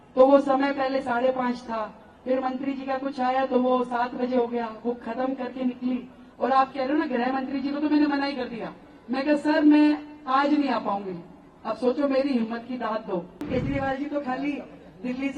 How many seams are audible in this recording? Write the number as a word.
one